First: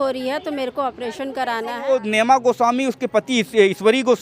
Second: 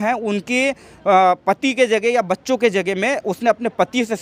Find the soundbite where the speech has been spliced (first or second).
first